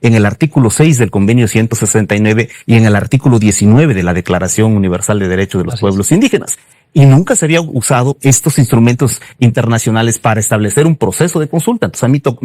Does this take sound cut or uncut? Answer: uncut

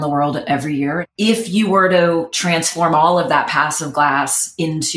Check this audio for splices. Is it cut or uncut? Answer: cut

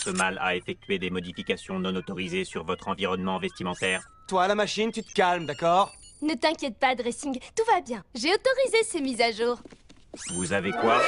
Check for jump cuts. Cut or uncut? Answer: cut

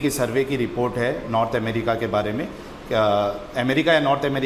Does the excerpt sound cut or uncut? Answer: uncut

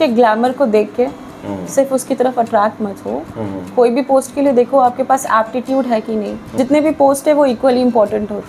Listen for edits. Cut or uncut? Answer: cut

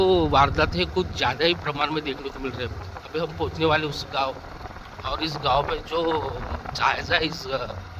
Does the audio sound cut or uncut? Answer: uncut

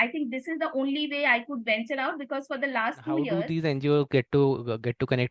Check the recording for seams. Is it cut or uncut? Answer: cut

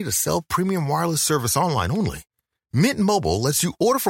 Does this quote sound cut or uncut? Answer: uncut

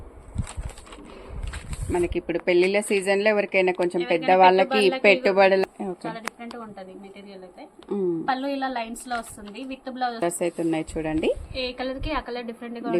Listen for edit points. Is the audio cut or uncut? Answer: cut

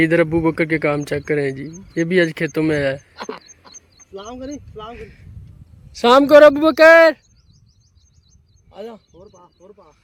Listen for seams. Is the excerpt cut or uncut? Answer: uncut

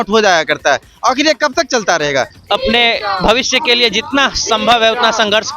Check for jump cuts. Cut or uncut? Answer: cut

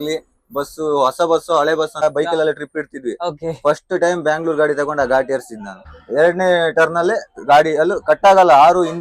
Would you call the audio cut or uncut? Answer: cut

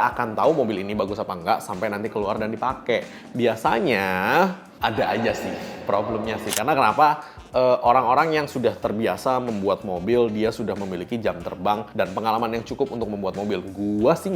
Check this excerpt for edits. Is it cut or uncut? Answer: uncut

